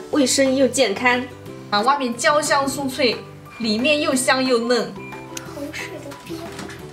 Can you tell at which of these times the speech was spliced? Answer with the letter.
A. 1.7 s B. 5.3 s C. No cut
A